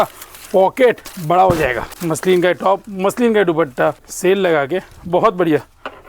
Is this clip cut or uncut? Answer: cut